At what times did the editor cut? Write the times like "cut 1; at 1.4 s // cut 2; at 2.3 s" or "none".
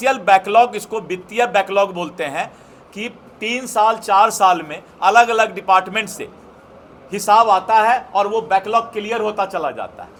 none